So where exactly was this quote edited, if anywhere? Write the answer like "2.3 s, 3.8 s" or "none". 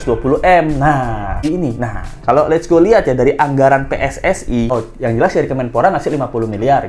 1.3 s, 4.7 s